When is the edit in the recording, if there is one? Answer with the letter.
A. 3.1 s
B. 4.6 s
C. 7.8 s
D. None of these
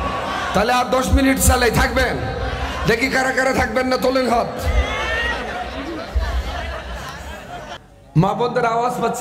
C